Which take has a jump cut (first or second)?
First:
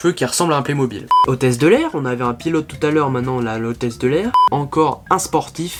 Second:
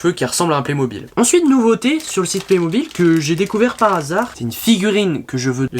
second